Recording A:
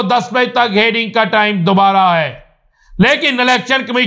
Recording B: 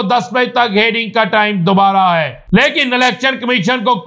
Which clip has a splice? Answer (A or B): B